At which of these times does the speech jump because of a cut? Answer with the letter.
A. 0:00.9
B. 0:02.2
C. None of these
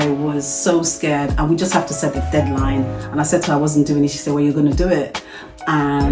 C